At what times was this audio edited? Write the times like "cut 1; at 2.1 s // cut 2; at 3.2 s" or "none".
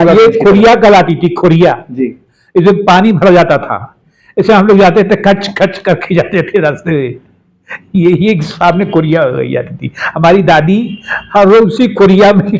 none